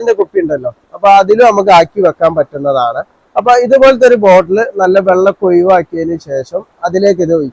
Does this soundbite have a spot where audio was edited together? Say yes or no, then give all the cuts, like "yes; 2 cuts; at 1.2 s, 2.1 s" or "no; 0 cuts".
no; 0 cuts